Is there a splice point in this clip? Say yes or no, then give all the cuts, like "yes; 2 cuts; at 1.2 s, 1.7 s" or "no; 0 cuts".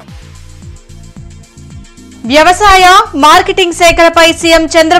no; 0 cuts